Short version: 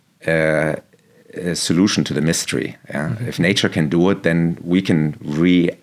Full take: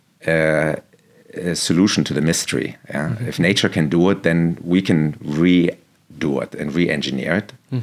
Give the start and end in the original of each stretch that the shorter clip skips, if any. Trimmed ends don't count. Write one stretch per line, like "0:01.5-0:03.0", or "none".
none

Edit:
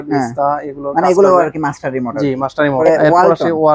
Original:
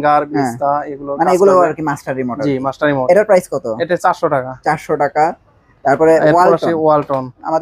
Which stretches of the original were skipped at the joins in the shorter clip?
0:03.1-0:06.1

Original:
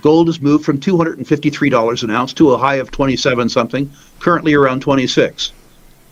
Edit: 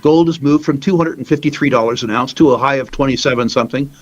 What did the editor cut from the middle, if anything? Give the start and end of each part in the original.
none

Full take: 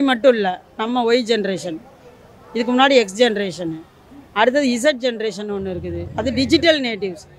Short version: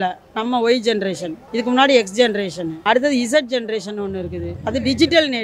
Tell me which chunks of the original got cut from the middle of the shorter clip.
0:01.8-0:02.4
0:03.7-0:04.2

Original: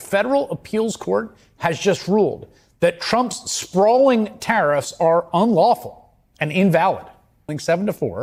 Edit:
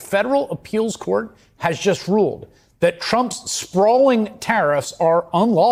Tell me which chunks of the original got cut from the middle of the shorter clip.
none

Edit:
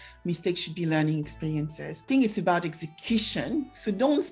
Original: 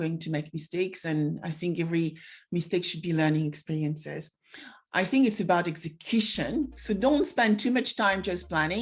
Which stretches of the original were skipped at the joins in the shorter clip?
0:04.3-0:05.1

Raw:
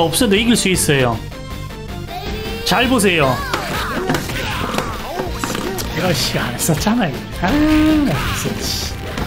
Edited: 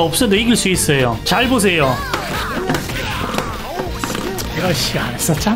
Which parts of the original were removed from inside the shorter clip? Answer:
0:01.2-0:02.6

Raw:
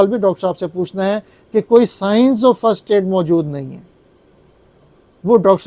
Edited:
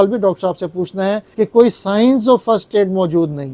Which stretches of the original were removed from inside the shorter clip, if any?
0:01.2-0:01.4

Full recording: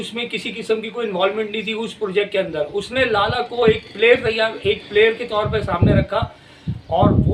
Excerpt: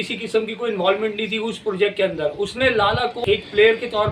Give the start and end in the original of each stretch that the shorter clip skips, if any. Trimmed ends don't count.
0:03.5-0:04.5

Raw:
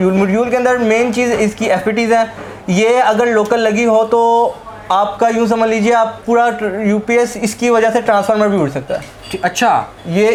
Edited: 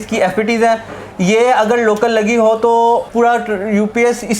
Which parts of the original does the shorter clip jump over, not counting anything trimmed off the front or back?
0:04.6-0:06.2

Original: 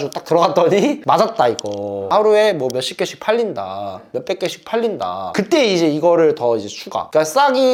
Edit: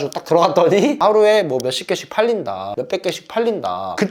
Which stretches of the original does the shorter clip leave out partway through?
0:01.0-0:02.1
0:03.8-0:04.0

